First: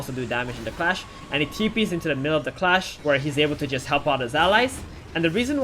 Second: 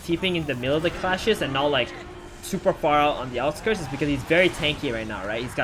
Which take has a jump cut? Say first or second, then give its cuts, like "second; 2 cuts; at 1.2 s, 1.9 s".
first; 1 cut; at 2.9 s